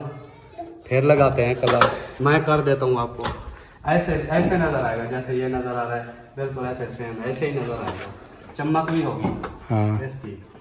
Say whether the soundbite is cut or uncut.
uncut